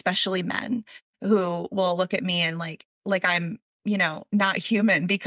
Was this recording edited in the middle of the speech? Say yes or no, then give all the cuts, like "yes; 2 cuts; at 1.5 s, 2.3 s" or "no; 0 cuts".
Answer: no; 0 cuts